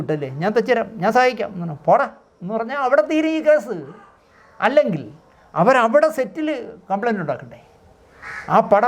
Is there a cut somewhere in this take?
no; 0 cuts

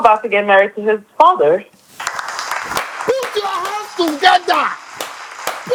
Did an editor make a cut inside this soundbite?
no; 0 cuts

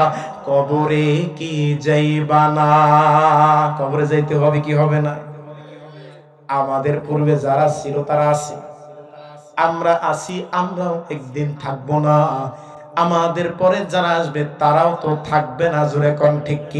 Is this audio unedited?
yes; 0 cuts

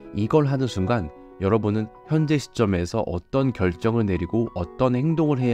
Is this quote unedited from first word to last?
yes; 0 cuts

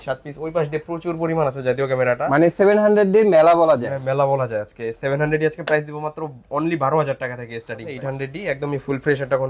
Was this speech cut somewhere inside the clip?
yes; 1 cut; at 7.9 s

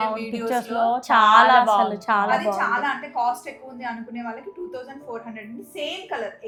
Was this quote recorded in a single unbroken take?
yes; 0 cuts

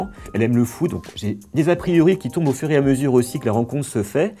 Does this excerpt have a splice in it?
no; 0 cuts

